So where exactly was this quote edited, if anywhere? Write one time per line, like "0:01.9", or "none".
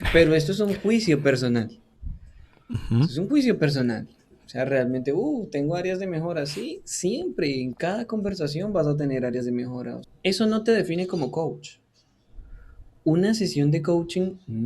0:10.0